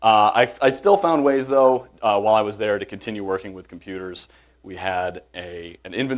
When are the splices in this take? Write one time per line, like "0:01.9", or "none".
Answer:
0:02.4